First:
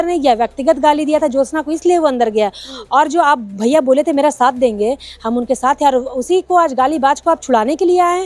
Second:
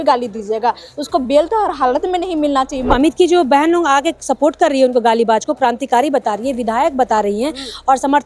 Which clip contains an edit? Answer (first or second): second